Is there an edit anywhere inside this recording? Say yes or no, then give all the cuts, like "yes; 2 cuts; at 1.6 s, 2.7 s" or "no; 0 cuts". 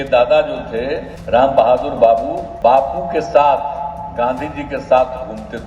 yes; 2 cuts; at 1.1 s, 2.4 s